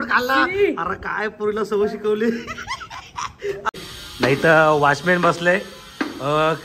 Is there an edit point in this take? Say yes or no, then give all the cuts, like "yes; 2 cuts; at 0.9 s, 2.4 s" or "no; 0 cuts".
yes; 1 cut; at 3.8 s